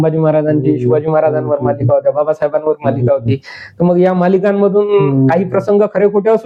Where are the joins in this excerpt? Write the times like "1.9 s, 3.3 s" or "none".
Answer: none